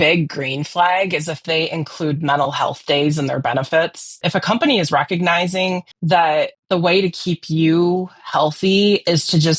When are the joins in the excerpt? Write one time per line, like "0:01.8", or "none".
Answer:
0:01.4
0:04.2